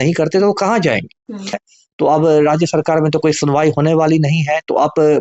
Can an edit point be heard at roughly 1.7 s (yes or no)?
yes